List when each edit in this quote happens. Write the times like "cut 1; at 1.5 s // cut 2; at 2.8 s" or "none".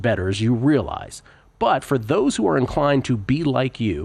none

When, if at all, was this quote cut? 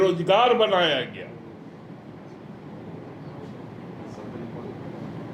none

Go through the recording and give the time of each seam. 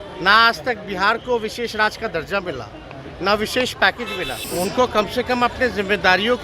cut 1; at 4.4 s

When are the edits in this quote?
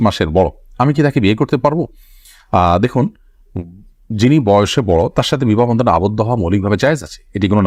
none

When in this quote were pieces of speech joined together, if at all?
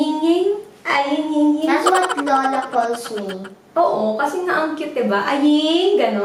none

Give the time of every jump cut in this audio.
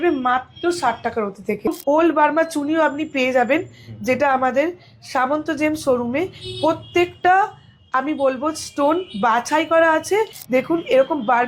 cut 1; at 1.7 s // cut 2; at 10.4 s

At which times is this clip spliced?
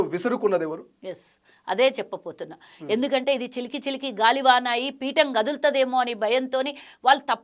none

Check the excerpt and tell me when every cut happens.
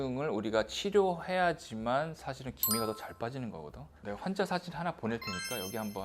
cut 1; at 3.9 s

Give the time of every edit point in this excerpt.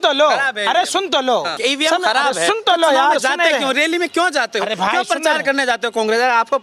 cut 1; at 1.5 s

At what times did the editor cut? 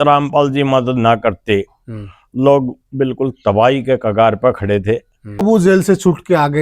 cut 1; at 5.4 s

